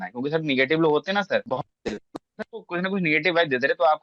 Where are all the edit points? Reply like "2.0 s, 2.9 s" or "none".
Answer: 1.4 s